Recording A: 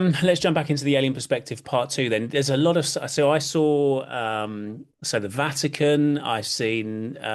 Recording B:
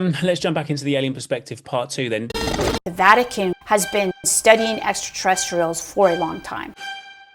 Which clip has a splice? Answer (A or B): B